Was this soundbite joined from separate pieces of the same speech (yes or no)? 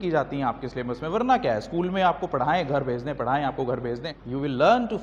yes